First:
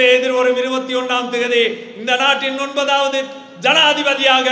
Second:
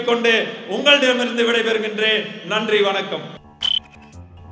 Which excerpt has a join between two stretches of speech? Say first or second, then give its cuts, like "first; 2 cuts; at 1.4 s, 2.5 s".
second; 1 cut; at 3.4 s